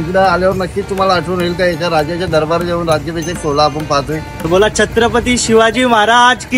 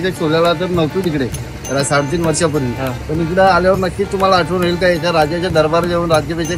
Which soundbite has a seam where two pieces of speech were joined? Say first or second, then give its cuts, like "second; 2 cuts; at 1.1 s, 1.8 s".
first; 1 cut; at 4.5 s